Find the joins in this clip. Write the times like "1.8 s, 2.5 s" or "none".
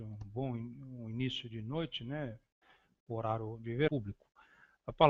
none